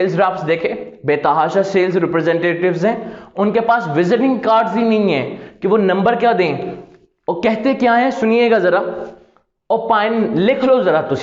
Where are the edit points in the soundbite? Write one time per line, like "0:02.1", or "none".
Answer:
none